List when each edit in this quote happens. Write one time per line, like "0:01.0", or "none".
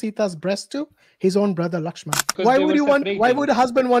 0:02.2